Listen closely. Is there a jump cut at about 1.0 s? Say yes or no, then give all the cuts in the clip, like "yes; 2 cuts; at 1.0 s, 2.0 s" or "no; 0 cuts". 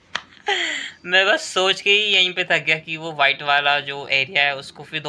no; 0 cuts